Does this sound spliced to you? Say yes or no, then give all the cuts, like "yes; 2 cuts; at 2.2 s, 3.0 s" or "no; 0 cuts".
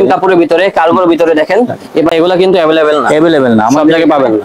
yes; 1 cut; at 2.1 s